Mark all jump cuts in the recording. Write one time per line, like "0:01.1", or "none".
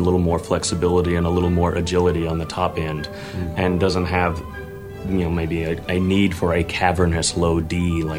none